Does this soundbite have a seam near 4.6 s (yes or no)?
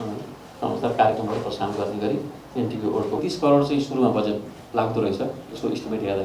no